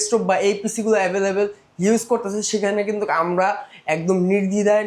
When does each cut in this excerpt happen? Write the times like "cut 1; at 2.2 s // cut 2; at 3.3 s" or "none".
none